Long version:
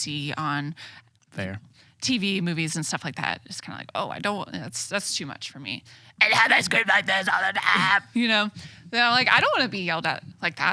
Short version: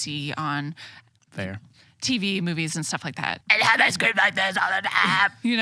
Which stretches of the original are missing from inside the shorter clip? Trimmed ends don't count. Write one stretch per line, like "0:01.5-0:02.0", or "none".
0:03.4-0:06.1